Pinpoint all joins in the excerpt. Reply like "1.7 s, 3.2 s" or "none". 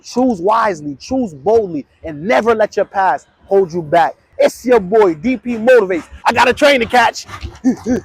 4.2 s, 6.2 s